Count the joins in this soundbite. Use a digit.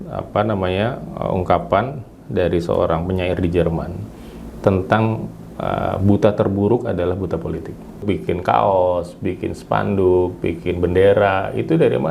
1